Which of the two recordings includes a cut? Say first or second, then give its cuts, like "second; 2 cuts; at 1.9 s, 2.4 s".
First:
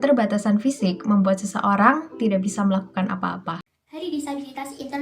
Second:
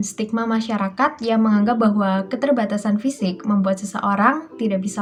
first; 1 cut; at 3.8 s